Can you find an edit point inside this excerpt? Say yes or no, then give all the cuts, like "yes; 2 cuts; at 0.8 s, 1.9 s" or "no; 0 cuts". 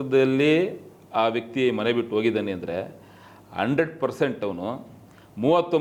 no; 0 cuts